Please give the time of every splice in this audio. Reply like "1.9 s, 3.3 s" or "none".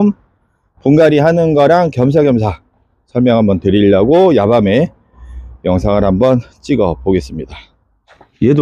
none